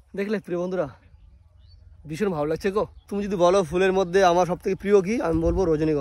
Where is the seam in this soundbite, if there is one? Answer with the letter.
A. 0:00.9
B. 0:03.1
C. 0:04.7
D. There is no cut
B